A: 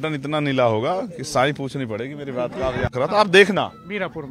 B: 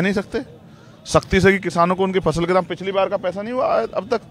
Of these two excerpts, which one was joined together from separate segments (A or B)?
A